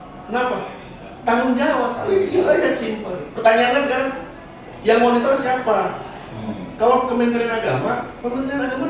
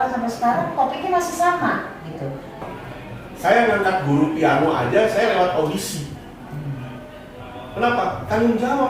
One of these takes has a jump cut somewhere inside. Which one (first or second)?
second